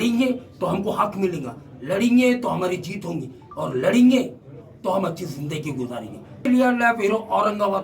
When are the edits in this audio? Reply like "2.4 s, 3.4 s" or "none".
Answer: 6.5 s

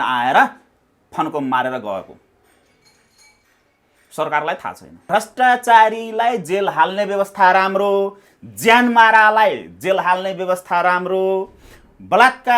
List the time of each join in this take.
5.0 s

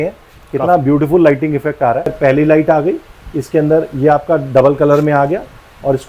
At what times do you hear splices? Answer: 2.1 s

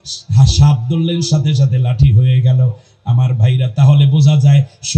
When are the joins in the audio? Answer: none

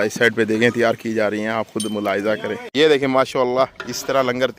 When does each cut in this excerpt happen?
2.6 s

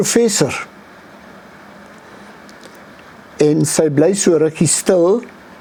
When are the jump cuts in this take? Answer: none

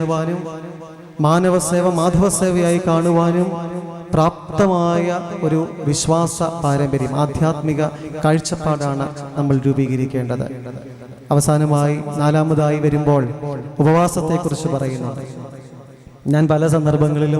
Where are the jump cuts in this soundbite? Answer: none

